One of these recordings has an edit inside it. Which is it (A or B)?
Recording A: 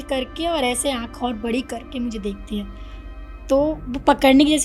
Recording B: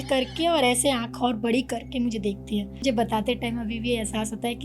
B